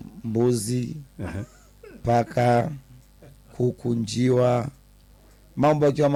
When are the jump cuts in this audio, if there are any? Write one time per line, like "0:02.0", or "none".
none